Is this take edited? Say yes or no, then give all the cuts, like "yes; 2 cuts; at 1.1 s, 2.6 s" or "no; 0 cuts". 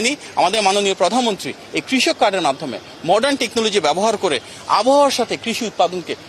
no; 0 cuts